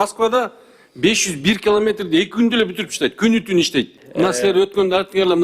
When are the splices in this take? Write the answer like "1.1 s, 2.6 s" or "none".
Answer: 4.0 s